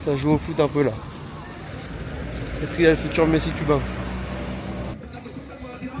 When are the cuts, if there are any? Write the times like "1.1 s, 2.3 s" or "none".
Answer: 1.7 s, 4.9 s